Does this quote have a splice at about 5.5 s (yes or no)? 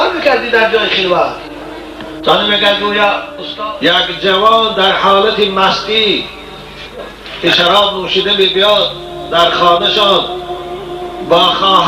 no